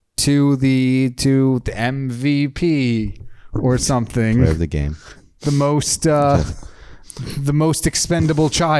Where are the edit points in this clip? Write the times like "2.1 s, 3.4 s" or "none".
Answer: none